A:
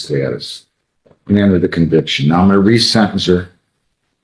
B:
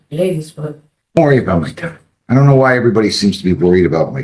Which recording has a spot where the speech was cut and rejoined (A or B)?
B